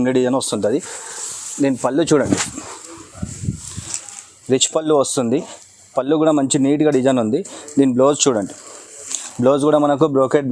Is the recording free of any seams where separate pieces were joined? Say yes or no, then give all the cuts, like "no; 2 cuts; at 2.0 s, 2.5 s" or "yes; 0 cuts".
yes; 0 cuts